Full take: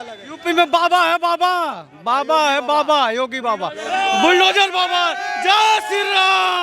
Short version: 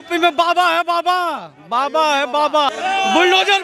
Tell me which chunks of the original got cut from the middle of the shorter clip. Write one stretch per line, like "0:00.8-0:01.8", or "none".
0:03.1-0:03.8